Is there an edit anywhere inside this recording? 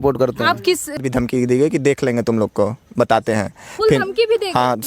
yes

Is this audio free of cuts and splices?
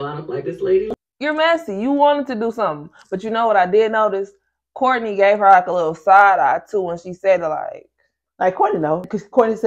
no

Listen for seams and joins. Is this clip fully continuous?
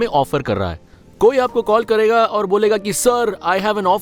yes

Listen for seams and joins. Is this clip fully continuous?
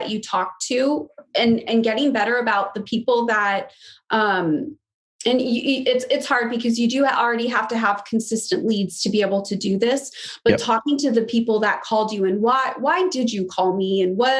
yes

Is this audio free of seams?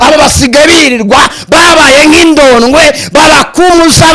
yes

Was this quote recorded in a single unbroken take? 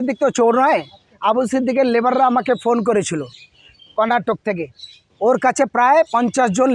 yes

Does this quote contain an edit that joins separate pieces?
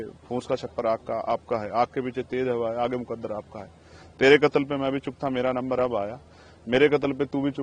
no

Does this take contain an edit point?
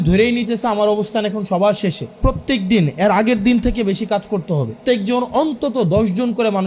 yes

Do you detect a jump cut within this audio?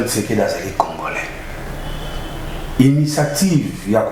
no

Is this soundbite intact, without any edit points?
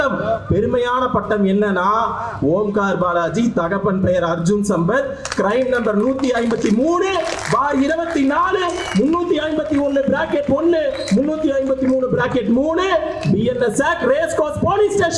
yes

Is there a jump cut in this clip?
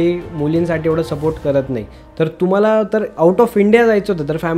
no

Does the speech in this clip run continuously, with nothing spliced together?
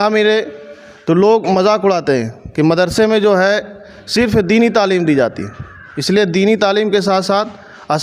yes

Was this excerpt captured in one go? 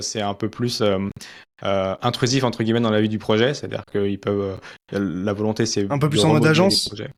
yes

